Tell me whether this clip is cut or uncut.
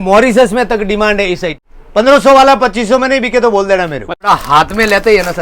cut